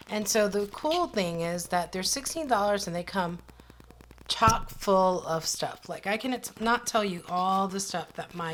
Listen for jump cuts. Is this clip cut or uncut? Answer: uncut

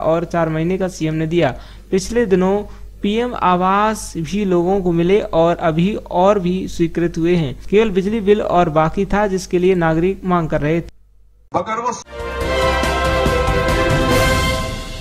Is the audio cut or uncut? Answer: cut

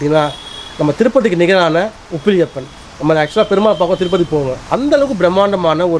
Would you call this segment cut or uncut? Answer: uncut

